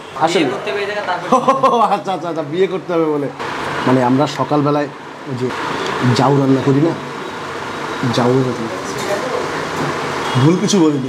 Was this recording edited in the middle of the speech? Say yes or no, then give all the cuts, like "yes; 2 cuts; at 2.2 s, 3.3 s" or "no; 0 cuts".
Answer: yes; 2 cuts; at 3.5 s, 5.5 s